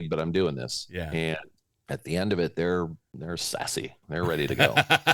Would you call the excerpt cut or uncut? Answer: cut